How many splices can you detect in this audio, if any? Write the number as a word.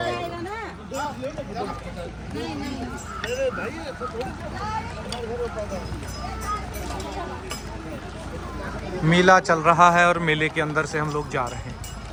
zero